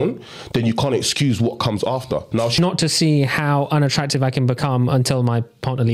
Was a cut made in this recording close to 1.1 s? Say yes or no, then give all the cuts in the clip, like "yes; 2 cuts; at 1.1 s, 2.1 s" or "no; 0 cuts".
no; 1 cut; at 2.6 s